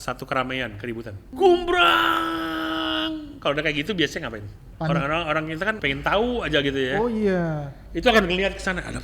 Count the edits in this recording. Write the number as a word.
three